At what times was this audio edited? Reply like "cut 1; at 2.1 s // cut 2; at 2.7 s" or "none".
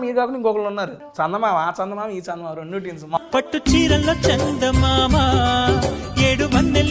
cut 1; at 1.0 s // cut 2; at 3.2 s